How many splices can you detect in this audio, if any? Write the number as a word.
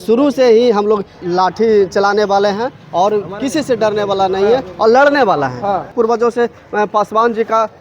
two